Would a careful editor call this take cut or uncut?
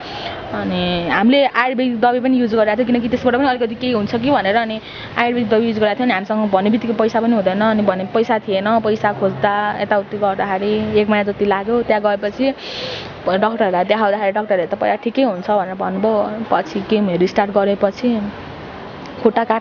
uncut